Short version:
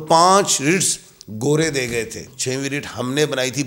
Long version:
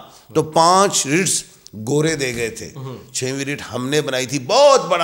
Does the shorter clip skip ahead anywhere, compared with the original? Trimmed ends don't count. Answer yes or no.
yes